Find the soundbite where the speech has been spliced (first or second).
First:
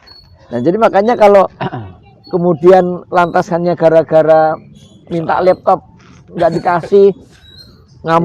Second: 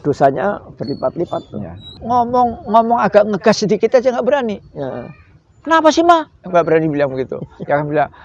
second